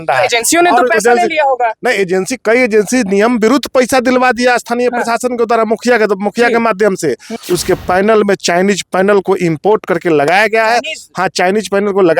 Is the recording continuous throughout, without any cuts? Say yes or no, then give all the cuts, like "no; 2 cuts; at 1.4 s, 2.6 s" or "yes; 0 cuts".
no; 1 cut; at 7.4 s